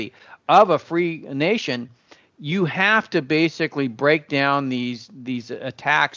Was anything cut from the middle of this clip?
no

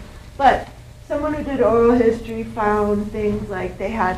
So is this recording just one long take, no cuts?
yes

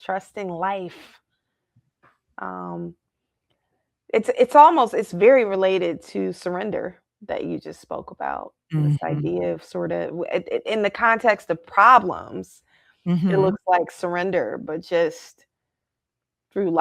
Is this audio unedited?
yes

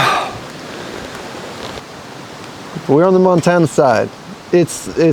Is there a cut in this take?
yes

